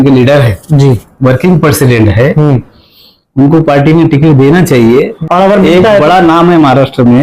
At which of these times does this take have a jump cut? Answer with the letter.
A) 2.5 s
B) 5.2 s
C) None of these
B